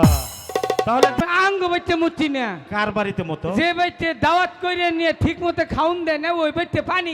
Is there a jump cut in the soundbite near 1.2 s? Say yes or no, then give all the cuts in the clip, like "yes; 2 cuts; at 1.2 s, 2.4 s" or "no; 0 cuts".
yes; 1 cut; at 1.2 s